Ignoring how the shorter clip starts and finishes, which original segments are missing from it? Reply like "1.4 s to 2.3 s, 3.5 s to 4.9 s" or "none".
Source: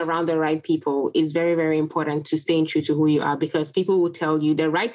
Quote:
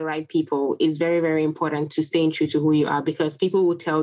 none